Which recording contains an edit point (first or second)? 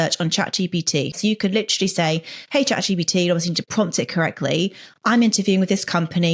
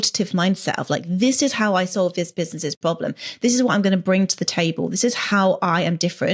first